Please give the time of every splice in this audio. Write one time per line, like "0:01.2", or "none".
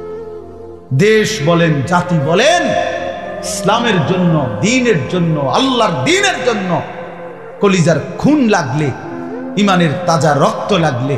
0:00.9